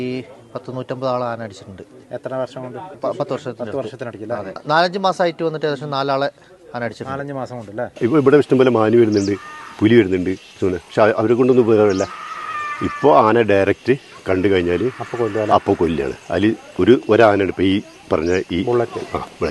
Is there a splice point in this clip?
yes; 3 cuts; at 3.0 s, 4.6 s, 7.8 s

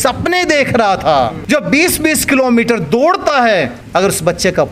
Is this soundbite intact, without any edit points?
no; 2 cuts; at 1.4 s, 3.8 s

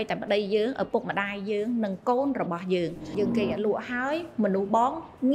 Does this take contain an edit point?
yes; 1 cut; at 3.1 s

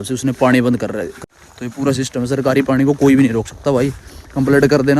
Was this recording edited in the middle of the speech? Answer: yes; 1 cut; at 1.2 s

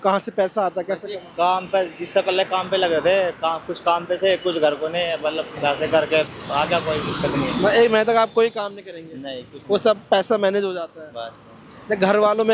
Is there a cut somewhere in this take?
no; 0 cuts

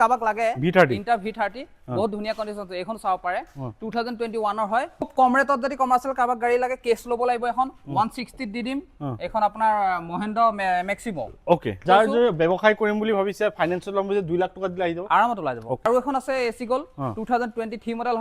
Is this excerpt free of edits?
no; 3 cuts; at 5.1 s, 11.8 s, 15.9 s

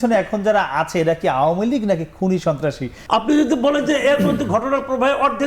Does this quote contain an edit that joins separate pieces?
yes; 1 cut; at 2.9 s

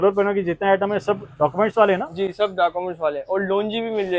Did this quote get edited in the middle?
no; 0 cuts

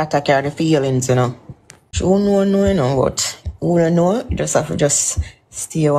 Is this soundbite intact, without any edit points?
no; 1 cut; at 1.9 s

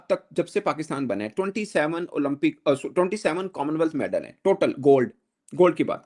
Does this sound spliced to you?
no; 0 cuts

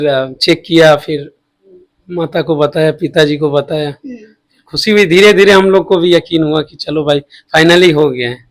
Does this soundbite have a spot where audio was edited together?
no; 0 cuts

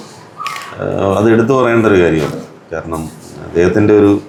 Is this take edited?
no; 0 cuts

